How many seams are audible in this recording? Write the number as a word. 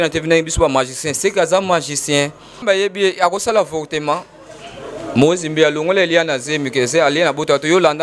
one